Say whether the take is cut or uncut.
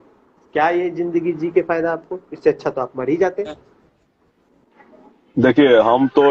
cut